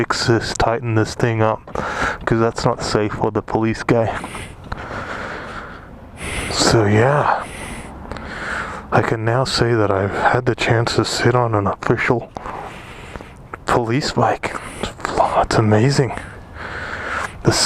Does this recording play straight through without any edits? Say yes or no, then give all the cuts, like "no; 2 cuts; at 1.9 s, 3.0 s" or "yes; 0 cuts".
yes; 0 cuts